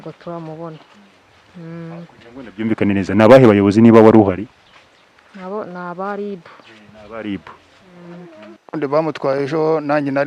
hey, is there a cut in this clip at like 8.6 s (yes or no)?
yes